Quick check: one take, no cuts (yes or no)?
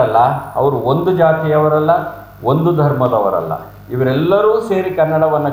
yes